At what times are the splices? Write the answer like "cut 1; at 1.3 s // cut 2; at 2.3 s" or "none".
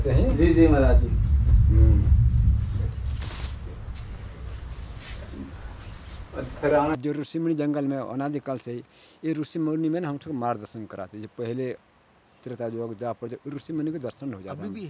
cut 1; at 7.0 s

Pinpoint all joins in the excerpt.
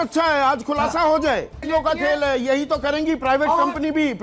cut 1; at 1.6 s

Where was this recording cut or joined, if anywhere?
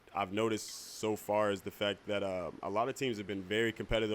none

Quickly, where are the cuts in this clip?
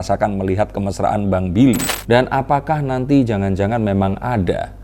cut 1; at 1.8 s

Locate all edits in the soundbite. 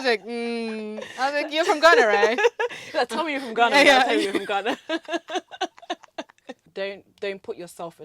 cut 1; at 6.6 s

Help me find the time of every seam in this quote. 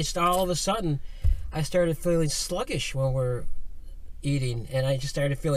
none

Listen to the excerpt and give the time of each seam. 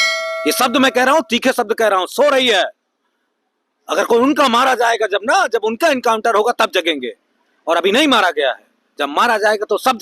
none

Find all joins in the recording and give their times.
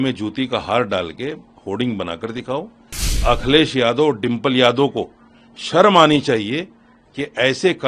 cut 1; at 3.2 s

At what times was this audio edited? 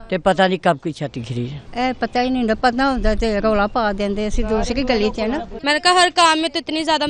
cut 1; at 1.6 s // cut 2; at 5.5 s

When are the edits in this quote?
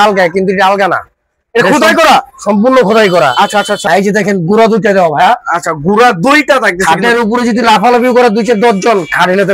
cut 1; at 3.8 s

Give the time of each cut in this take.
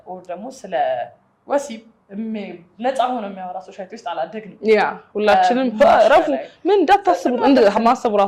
none

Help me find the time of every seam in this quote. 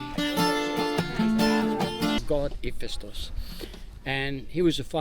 cut 1; at 2.4 s

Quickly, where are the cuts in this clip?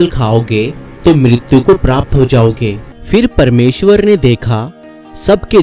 cut 1; at 2.9 s

